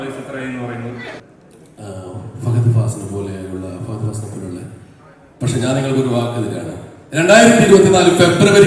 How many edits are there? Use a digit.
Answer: 1